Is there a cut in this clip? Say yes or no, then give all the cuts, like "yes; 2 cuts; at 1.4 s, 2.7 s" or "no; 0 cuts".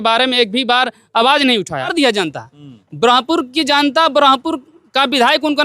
yes; 1 cut; at 1.9 s